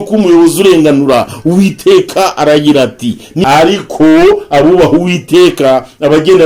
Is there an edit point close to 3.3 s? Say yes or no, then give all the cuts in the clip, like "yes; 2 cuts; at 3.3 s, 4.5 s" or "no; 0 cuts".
yes; 1 cut; at 3.3 s